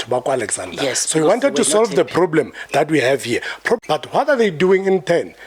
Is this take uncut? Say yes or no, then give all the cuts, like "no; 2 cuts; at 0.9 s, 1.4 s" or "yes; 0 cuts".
no; 1 cut; at 3.8 s